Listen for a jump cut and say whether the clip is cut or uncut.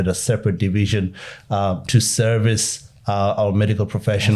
uncut